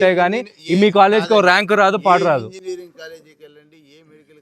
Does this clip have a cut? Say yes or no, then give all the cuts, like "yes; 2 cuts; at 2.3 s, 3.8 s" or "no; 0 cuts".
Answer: no; 0 cuts